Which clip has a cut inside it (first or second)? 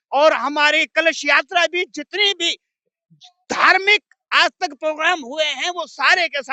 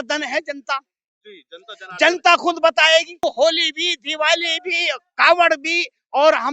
second